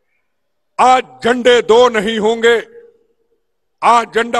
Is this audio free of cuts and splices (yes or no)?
yes